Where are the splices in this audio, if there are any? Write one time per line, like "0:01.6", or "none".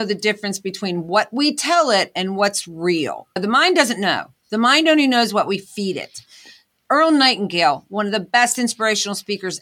none